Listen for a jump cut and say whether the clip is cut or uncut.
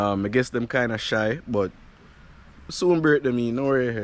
uncut